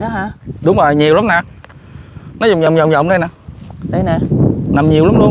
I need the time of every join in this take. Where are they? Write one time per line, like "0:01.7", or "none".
none